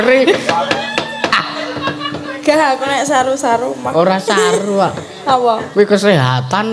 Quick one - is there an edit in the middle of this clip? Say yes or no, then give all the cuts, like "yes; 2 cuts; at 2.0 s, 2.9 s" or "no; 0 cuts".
yes; 1 cut; at 1.3 s